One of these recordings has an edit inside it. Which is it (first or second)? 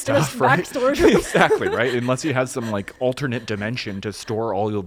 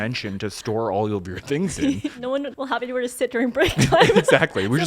second